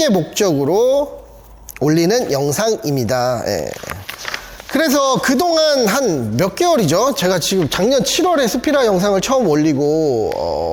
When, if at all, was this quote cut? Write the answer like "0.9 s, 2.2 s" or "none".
none